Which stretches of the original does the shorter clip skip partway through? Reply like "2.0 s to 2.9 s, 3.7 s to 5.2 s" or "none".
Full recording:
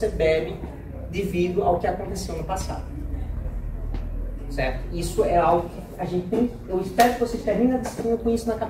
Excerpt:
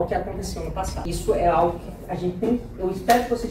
2.7 s to 4.9 s